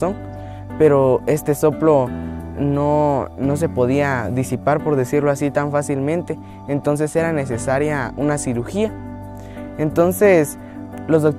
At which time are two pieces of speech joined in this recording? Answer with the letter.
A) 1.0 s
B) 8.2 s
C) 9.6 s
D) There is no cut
A